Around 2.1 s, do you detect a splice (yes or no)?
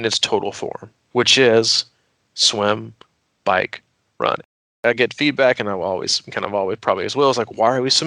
no